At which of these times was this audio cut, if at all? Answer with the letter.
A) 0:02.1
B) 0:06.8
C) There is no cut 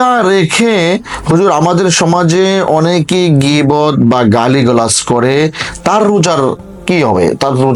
C